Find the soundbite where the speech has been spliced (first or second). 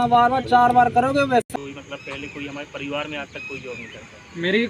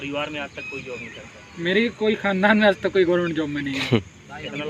first